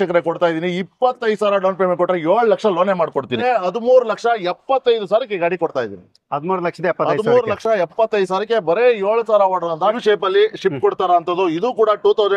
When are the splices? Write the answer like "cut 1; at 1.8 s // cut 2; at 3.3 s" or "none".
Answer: cut 1; at 3.4 s // cut 2; at 10.0 s